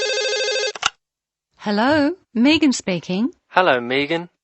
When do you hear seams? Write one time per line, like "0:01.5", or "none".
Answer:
0:01.1